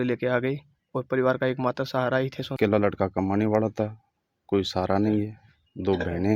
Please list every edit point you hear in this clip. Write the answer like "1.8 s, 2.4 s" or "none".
2.5 s